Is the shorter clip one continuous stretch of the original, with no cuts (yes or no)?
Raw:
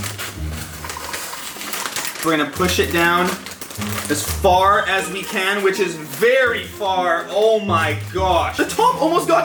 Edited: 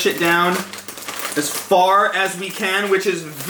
yes